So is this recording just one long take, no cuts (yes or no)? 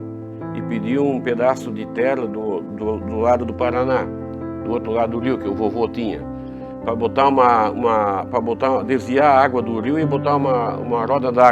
yes